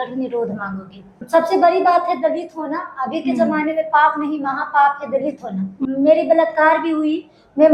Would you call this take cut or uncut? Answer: cut